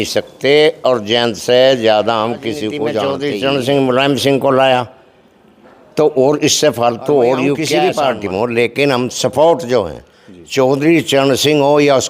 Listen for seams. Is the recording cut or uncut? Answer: cut